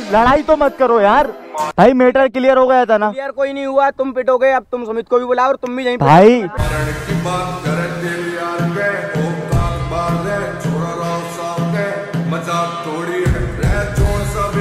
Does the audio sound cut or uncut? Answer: cut